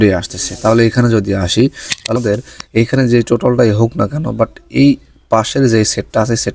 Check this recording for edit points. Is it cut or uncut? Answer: cut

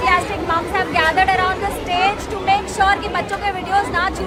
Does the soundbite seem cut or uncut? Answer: uncut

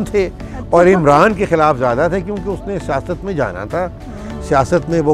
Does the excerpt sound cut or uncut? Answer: uncut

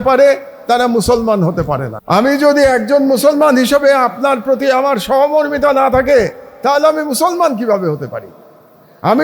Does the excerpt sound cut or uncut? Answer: cut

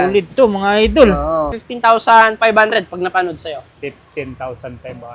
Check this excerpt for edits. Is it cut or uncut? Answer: cut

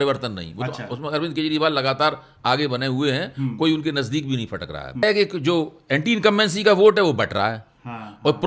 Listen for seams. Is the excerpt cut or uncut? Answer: cut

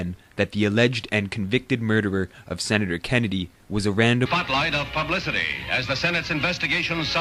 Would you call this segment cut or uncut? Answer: uncut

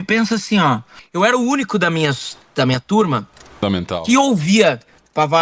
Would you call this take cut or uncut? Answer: cut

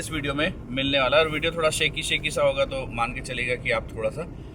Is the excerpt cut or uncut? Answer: uncut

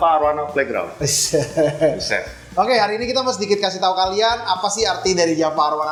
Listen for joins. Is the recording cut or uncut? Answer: uncut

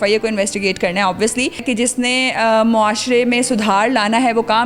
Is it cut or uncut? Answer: cut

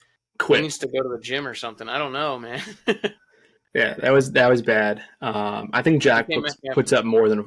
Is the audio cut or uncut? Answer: uncut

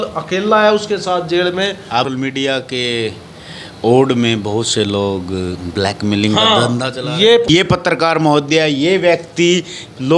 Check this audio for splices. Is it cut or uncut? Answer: cut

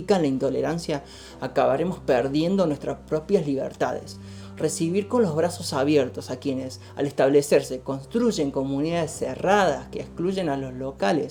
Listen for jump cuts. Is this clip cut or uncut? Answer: uncut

